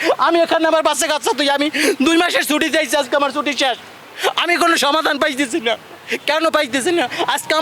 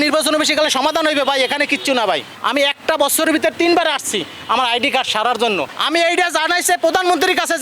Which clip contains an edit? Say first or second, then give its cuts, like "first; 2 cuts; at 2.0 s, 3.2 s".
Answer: second; 2 cuts; at 2.3 s, 5.8 s